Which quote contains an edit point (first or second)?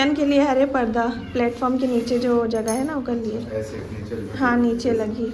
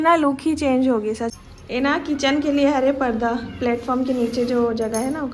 second